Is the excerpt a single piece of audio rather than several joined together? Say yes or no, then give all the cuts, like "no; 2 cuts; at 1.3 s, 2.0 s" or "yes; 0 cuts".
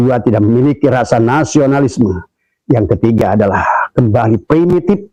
yes; 0 cuts